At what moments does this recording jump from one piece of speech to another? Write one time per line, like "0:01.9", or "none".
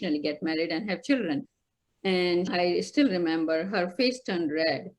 0:01.4
0:02.5